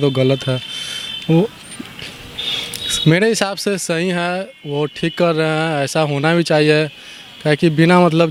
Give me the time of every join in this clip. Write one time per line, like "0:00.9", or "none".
none